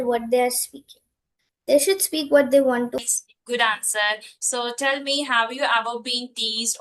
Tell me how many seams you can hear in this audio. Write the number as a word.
one